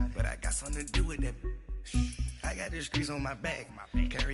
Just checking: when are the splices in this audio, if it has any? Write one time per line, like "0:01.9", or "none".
0:02.0